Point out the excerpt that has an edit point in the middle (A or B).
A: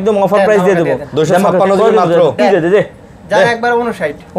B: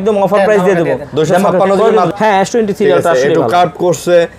B